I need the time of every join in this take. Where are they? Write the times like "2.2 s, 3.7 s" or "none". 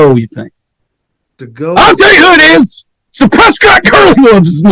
1.3 s